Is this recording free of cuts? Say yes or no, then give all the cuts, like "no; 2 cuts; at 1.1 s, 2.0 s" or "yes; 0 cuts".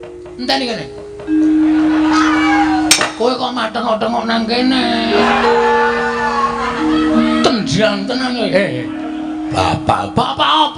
no; 1 cut; at 5.2 s